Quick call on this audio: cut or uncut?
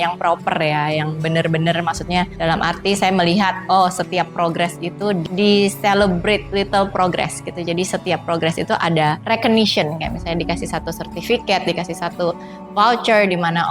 cut